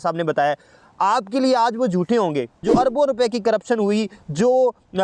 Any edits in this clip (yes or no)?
yes